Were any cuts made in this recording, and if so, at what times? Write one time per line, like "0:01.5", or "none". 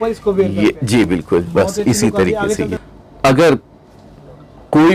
0:02.8